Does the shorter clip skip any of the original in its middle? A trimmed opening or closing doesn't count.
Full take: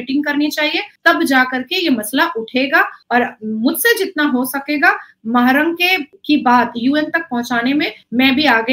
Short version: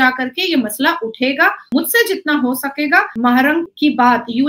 yes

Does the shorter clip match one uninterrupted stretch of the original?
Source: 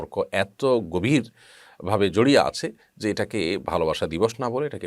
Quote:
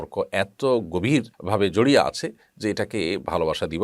no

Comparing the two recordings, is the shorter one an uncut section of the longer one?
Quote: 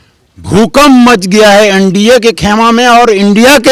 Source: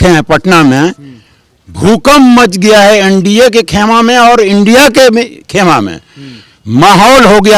yes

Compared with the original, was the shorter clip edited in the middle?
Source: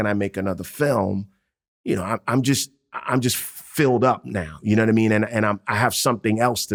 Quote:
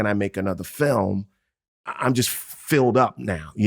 yes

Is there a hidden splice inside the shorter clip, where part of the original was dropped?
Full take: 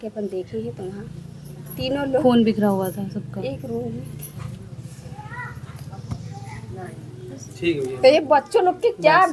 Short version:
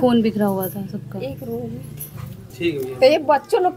yes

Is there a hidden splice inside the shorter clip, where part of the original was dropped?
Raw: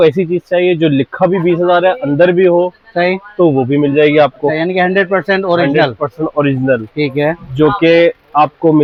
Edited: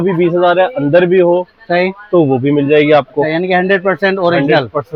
no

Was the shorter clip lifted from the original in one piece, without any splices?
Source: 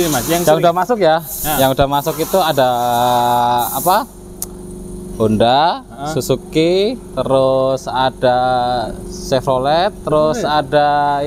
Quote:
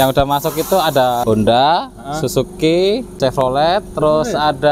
no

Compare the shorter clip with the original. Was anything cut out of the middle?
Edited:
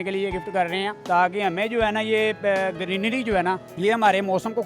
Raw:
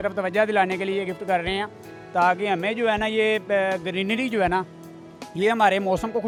yes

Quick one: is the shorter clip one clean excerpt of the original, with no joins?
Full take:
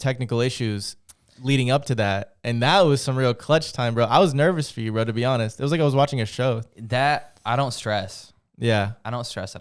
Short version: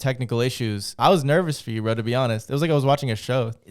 no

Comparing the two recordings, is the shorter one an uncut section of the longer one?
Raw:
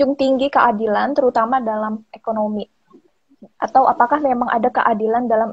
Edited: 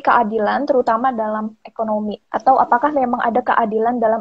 no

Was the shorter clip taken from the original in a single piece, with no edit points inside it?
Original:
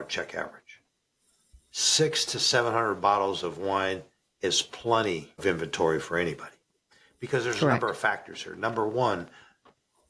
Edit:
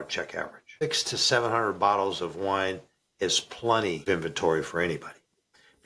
no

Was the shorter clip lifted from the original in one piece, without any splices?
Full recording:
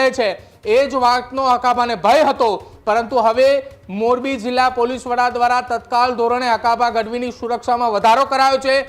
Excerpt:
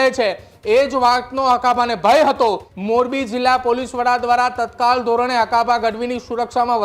no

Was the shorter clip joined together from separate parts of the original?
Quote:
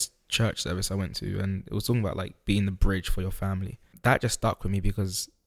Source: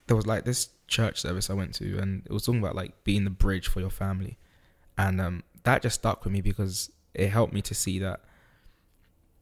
yes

